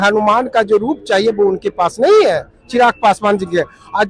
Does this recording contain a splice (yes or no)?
no